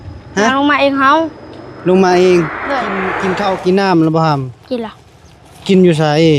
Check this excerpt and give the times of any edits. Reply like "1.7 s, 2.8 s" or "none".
3.1 s